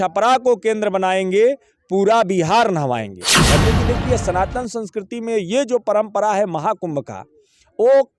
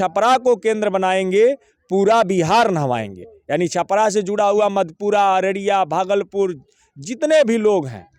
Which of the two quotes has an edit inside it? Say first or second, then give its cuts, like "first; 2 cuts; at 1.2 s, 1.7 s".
first; 1 cut; at 3.6 s